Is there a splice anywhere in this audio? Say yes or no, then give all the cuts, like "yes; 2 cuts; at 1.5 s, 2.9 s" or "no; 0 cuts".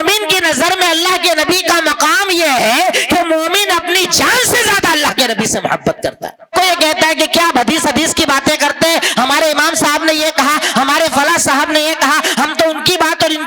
yes; 1 cut; at 6.5 s